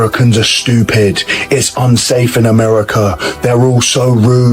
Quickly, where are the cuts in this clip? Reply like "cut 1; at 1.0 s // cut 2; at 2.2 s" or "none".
none